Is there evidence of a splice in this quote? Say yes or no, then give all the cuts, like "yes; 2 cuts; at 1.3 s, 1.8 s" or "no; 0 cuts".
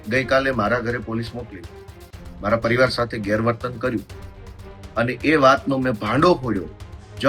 no; 0 cuts